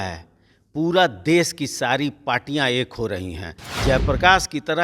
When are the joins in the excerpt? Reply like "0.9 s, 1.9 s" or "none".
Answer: 3.6 s